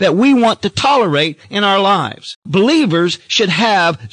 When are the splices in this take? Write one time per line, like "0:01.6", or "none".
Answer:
0:02.3